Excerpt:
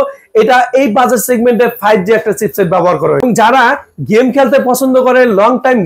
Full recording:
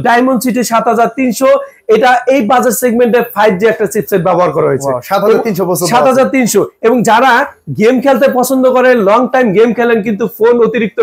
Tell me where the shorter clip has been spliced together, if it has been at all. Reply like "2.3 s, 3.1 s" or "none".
3.2 s